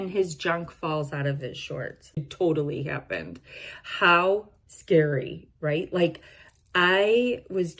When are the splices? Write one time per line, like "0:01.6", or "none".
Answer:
0:02.3